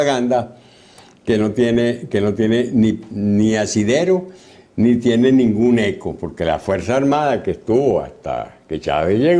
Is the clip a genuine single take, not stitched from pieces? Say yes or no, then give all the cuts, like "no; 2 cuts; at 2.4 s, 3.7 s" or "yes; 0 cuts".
no; 1 cut; at 5.2 s